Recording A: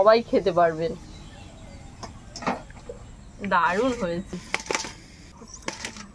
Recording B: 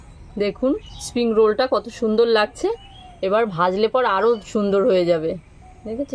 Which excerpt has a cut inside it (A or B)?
A